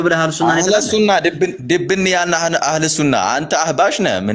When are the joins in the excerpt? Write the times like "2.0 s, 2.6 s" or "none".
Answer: none